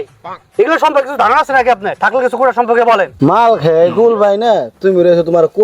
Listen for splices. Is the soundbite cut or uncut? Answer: cut